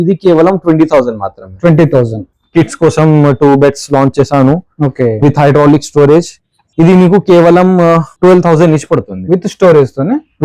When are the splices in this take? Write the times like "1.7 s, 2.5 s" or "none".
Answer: 2.3 s